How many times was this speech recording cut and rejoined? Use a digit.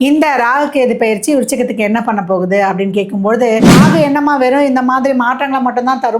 1